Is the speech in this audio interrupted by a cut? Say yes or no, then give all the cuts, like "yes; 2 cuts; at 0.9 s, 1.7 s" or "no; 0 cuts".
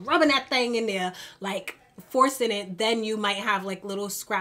no; 0 cuts